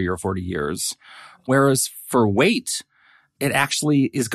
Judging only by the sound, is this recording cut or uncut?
uncut